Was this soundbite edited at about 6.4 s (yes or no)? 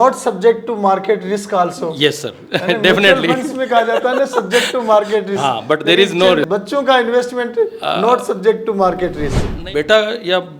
yes